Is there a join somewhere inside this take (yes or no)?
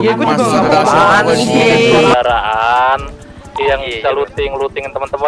yes